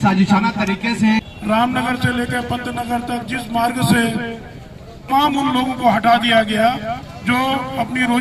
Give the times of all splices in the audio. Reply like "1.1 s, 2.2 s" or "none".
1.2 s, 5.1 s